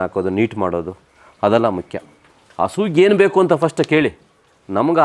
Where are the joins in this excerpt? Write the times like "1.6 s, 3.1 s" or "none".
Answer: none